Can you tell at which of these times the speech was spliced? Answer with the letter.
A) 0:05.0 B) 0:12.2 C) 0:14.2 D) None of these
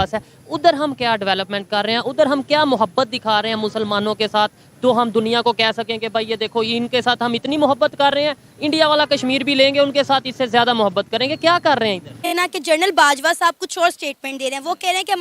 B